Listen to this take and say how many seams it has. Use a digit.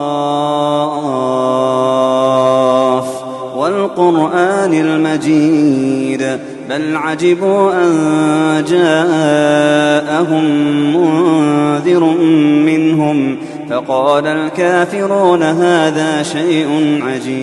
0